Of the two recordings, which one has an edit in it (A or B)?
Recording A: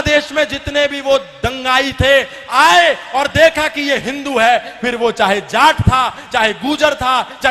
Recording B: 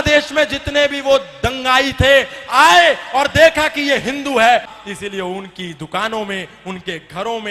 B